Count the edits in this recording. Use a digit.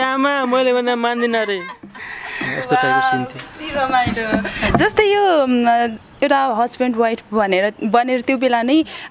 0